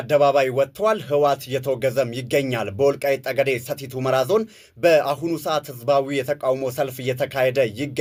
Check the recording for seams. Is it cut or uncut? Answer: uncut